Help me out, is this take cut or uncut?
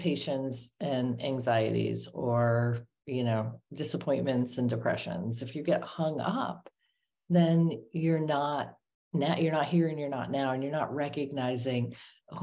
uncut